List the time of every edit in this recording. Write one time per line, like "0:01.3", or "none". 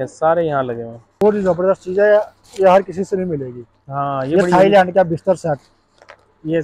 0:01.2